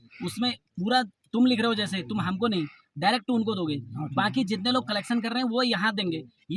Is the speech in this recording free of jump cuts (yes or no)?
yes